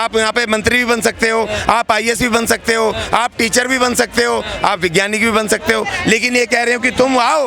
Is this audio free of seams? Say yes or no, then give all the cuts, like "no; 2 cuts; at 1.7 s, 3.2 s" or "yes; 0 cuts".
yes; 0 cuts